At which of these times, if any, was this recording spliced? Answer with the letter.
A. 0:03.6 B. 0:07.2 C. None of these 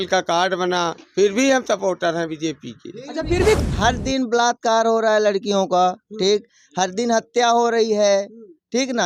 A